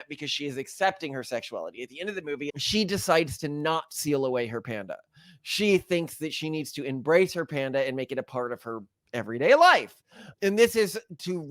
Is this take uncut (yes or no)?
no